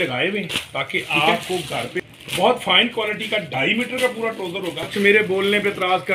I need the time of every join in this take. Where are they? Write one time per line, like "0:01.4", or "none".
0:02.0
0:04.9